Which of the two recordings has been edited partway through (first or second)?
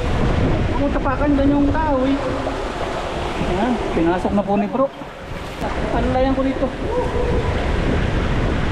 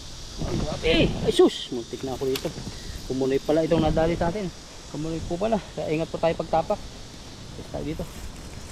first